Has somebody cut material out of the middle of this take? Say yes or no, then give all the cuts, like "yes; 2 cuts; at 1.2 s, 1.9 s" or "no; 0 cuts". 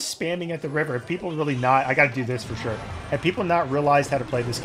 no; 0 cuts